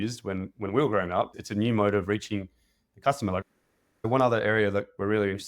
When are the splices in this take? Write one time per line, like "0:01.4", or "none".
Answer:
0:01.4
0:03.4

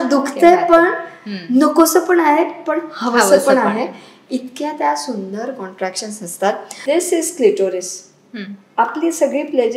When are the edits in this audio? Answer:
0:06.7

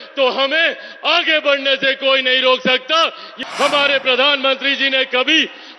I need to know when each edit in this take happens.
0:03.2

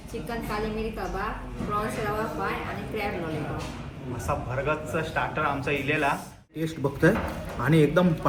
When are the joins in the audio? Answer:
0:06.6

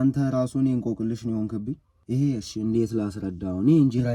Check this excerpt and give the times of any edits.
0:01.9

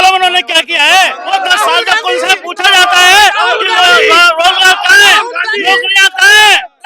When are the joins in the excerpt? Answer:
0:01.2

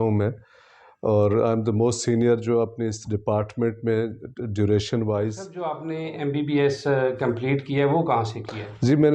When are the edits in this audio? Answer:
0:05.8

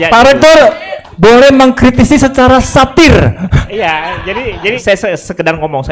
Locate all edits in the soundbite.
0:04.8

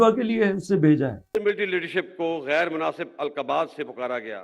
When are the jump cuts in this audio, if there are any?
0:01.4

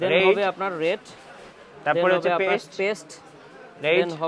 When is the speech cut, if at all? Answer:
none

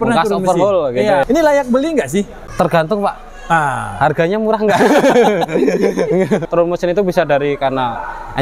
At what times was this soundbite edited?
0:01.2
0:02.4
0:06.5

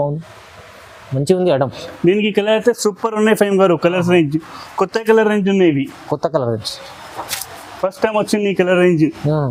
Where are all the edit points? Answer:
none

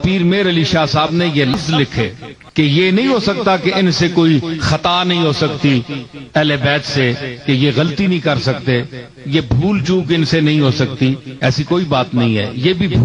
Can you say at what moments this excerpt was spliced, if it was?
0:01.5

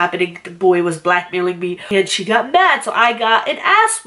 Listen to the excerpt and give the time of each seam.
0:01.8

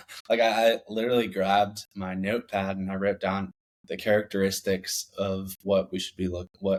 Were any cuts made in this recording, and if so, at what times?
none

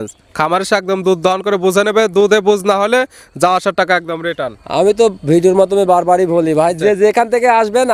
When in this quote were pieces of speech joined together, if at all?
none

